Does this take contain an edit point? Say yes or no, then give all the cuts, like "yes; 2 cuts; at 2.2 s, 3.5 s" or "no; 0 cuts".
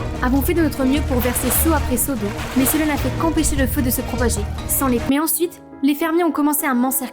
yes; 1 cut; at 5.0 s